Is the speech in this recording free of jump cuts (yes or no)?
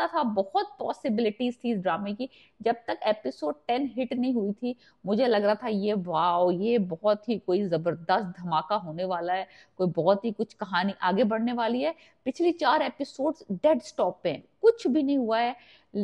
yes